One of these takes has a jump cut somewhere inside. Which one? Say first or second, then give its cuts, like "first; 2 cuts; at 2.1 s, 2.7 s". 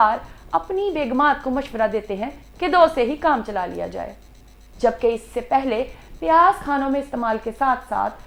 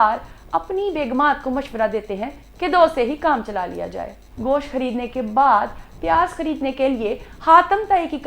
second; 1 cut; at 4.3 s